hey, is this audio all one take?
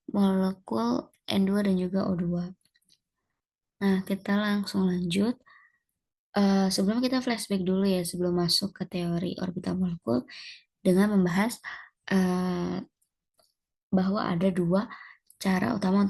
yes; 0 cuts

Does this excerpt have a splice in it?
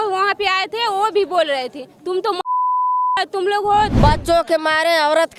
yes; 1 cut; at 3.9 s

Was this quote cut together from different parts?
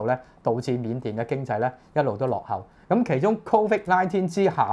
no; 0 cuts

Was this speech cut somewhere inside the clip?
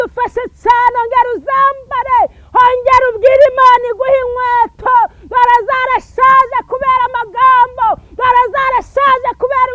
no; 0 cuts

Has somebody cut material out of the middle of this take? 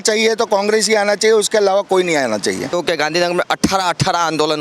yes; 1 cut; at 2.7 s

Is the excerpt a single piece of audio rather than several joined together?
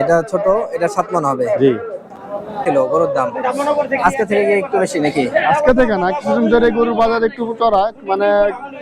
no; 1 cut; at 2.6 s

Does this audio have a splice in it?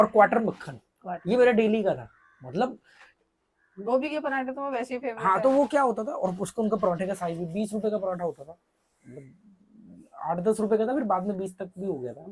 no; 0 cuts

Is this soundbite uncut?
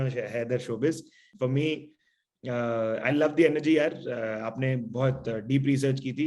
no; 1 cut; at 1.2 s

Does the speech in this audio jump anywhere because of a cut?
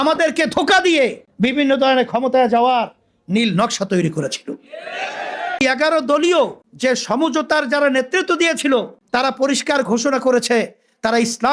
yes; 3 cuts; at 1.2 s, 5.6 s, 6.6 s

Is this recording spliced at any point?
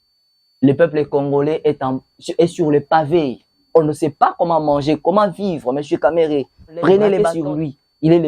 yes; 1 cut; at 7.3 s

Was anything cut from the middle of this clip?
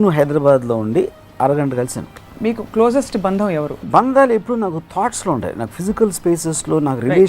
yes; 2 cuts; at 2.2 s, 3.8 s

